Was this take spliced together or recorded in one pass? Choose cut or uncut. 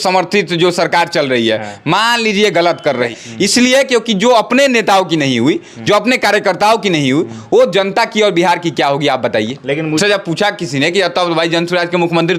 cut